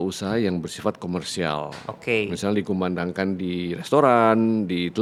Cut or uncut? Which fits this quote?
uncut